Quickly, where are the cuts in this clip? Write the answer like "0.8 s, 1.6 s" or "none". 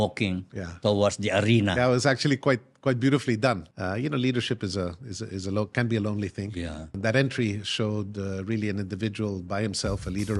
3.7 s, 6.9 s